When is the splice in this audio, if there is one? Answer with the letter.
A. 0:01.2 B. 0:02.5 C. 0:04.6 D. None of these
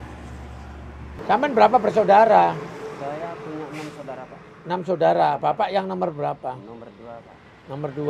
A